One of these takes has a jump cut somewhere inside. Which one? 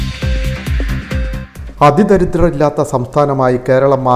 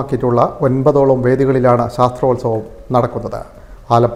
first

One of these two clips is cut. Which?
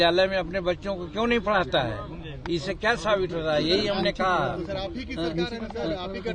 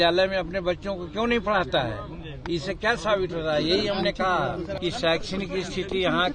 second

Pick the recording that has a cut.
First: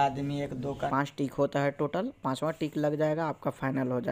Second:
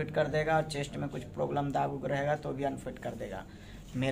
first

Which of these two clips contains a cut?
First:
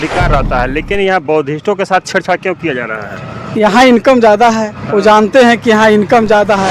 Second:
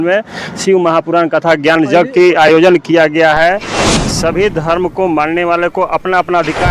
second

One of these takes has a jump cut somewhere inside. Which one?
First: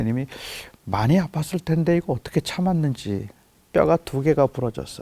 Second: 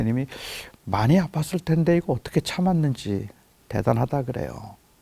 first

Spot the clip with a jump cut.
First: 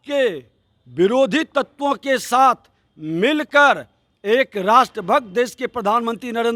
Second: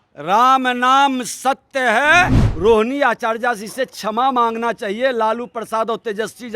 second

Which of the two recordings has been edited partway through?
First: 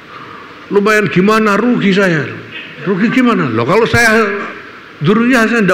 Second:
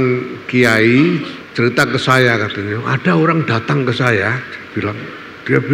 second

